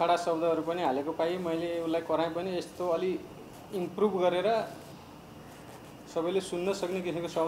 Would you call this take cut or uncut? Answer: uncut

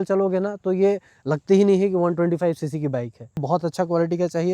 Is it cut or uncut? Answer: cut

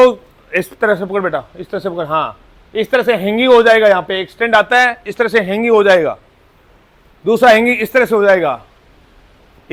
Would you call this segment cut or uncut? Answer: uncut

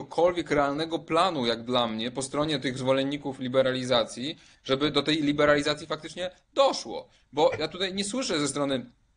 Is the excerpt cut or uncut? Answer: uncut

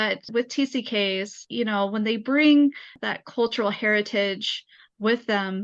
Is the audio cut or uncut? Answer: uncut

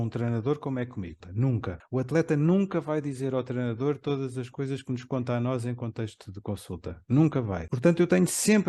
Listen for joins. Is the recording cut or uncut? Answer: cut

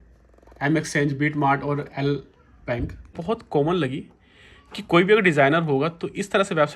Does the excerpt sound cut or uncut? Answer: cut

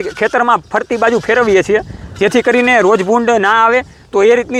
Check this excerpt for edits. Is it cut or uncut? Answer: uncut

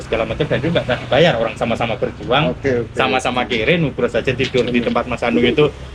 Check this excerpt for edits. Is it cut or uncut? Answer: uncut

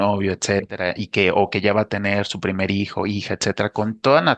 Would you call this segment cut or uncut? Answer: uncut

